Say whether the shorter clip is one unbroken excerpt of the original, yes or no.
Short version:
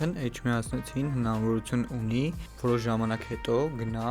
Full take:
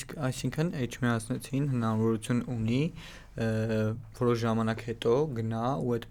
no